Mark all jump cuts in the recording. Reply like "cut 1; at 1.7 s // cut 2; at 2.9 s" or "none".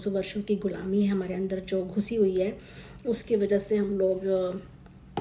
none